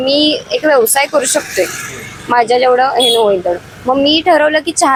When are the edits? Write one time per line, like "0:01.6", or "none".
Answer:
none